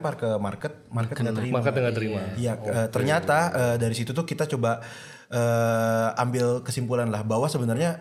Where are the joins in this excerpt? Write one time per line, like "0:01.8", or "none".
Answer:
none